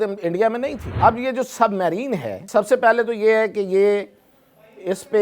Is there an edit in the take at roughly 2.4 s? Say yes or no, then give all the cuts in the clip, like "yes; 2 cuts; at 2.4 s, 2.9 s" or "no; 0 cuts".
yes; 2 cuts; at 0.9 s, 2.4 s